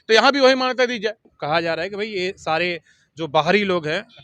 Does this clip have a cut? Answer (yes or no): yes